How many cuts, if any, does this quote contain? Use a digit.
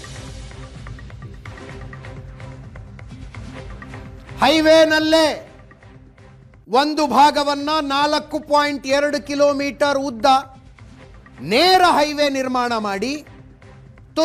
0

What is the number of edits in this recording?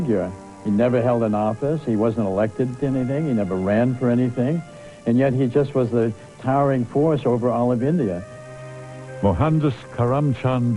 1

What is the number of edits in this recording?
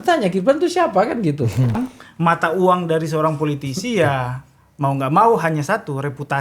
1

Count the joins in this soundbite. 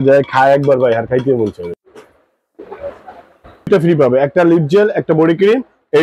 2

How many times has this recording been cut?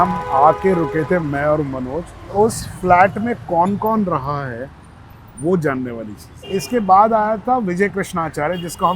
2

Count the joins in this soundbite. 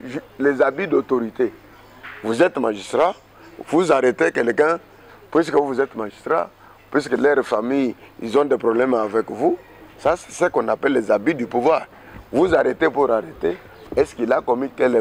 0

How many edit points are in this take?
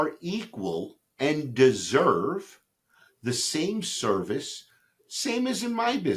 0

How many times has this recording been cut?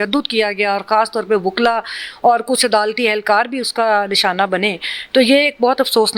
0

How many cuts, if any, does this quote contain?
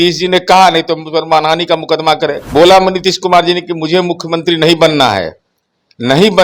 1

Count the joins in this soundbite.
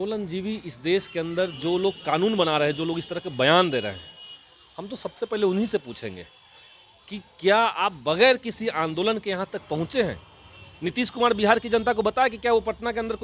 0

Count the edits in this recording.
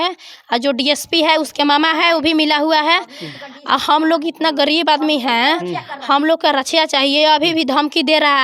0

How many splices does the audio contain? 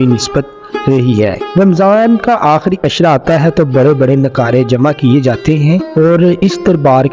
2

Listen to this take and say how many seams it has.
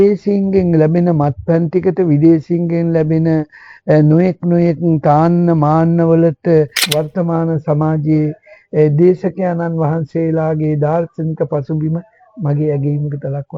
1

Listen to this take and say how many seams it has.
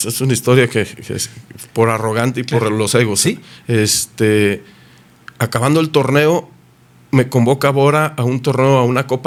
0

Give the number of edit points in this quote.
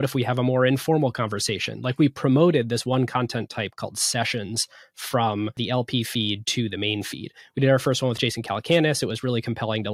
1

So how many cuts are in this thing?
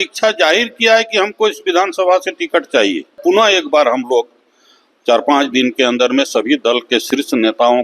1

